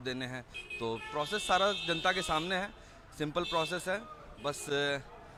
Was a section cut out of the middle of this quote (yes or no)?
no